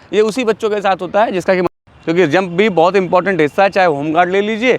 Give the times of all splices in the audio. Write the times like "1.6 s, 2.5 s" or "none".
1.7 s